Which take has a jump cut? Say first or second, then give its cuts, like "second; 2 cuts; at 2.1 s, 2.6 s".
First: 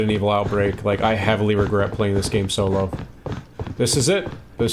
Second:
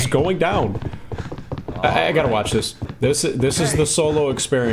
second; 1 cut; at 2.8 s